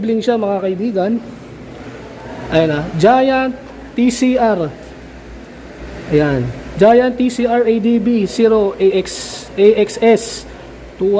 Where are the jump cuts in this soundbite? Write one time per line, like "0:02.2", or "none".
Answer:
none